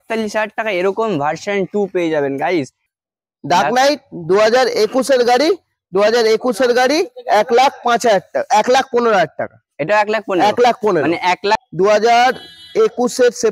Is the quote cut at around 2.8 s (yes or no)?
yes